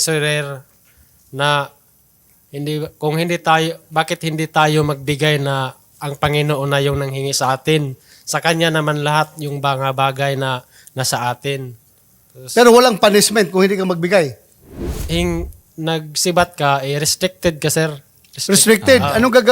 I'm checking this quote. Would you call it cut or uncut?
cut